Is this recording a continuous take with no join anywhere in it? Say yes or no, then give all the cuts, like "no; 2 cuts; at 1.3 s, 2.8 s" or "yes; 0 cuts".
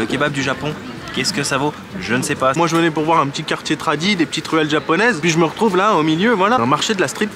no; 3 cuts; at 2.6 s, 5.2 s, 6.6 s